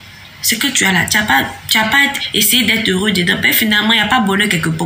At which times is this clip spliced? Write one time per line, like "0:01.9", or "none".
none